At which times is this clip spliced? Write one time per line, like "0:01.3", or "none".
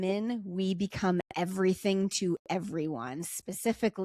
none